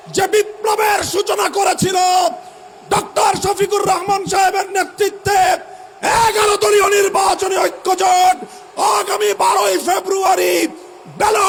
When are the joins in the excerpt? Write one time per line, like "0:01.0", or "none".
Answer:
none